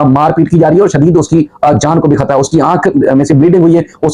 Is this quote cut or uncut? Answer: uncut